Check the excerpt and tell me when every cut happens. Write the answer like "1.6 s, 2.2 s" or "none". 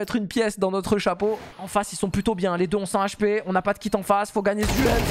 1.5 s